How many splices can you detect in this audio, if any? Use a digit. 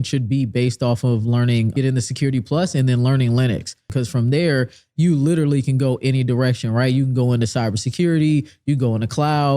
2